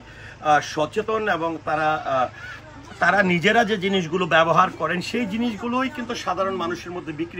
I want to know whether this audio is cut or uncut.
uncut